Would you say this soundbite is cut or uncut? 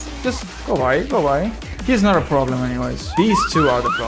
cut